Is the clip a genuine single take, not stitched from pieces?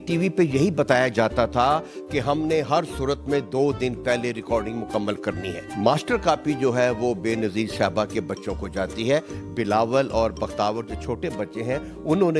yes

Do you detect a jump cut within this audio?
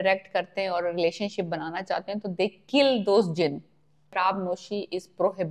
yes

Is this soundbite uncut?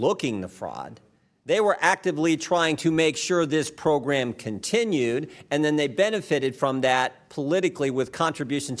yes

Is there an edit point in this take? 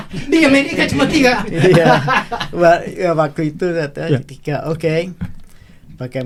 no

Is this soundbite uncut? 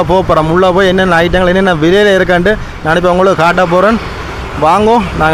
yes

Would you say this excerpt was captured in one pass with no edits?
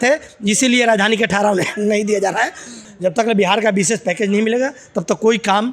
no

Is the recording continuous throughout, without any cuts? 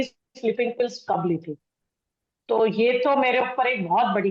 yes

